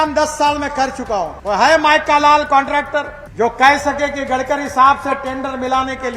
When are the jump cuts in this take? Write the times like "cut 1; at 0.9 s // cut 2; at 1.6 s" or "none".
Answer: cut 1; at 1.4 s // cut 2; at 3.2 s